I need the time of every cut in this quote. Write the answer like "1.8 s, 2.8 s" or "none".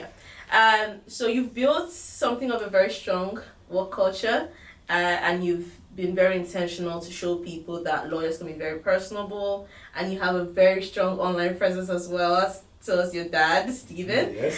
none